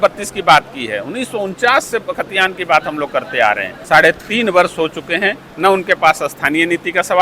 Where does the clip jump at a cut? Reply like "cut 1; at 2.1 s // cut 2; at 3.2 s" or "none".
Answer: cut 1; at 3.7 s